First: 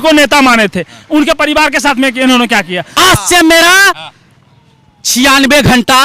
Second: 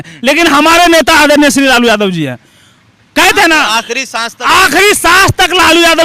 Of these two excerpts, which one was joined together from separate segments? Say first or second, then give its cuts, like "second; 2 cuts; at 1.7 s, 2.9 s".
first; 1 cut; at 2.9 s